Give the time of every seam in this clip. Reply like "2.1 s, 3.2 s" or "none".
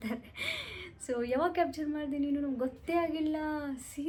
none